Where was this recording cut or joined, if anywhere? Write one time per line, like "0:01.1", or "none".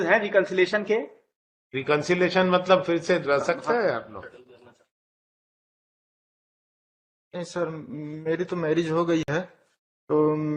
none